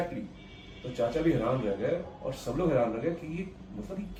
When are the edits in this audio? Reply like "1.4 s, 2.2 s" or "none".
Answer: none